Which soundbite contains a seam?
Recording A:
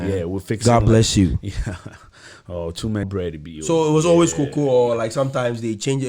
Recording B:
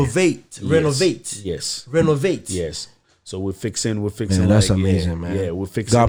A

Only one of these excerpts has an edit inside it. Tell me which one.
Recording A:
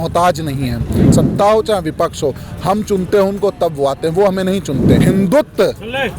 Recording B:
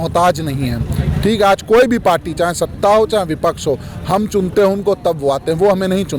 A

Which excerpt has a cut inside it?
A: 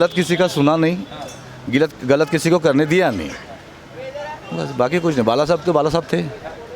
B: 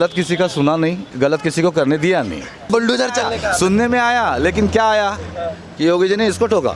B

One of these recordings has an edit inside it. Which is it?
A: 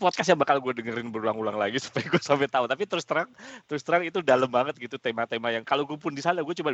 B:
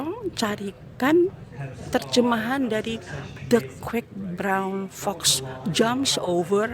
B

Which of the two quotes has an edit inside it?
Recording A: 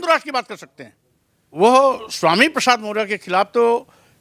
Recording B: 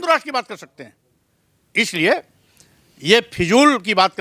A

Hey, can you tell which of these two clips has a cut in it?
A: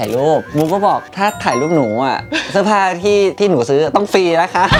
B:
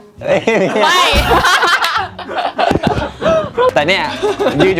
B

